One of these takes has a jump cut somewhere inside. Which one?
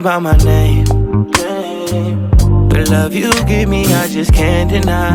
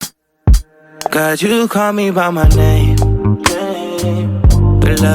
second; 1 cut; at 1.1 s

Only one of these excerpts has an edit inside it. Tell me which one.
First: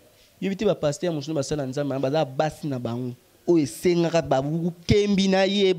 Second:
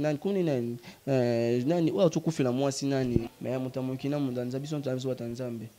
second; 1 cut; at 3.3 s

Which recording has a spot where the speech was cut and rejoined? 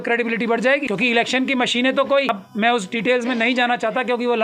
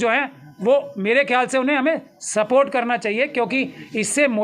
first; 2 cuts; at 0.8 s, 2.3 s

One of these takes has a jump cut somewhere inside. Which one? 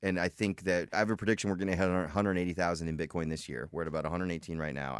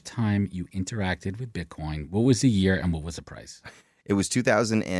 first; 1 cut; at 0.9 s

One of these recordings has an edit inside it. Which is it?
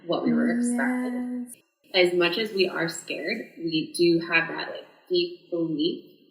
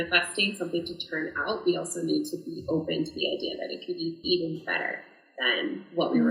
first; 1 cut; at 1.6 s

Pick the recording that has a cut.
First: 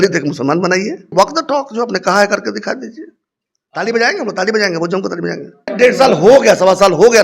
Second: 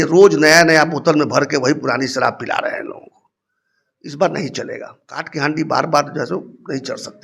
first; 2 cuts; at 1.1 s, 5.7 s

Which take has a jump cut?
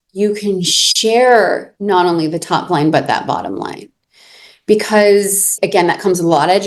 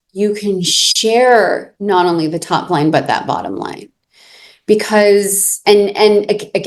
first; 1 cut; at 5.5 s

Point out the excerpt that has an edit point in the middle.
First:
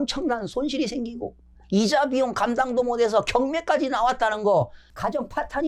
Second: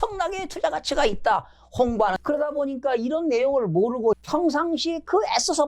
second; 2 cuts; at 2.2 s, 4.2 s

